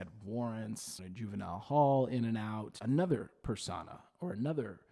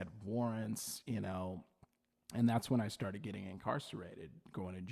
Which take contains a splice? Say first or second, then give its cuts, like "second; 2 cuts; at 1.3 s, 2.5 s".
first; 2 cuts; at 1.0 s, 2.7 s